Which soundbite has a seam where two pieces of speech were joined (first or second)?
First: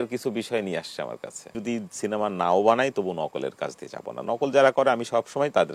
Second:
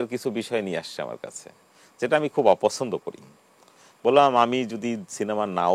first